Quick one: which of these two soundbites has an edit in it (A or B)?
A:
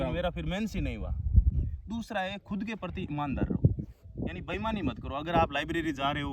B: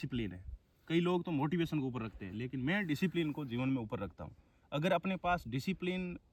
A